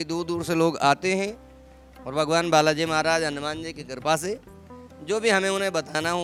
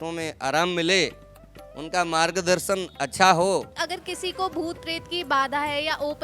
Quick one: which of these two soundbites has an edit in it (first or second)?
second